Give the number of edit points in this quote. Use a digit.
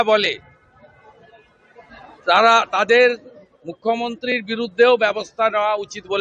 0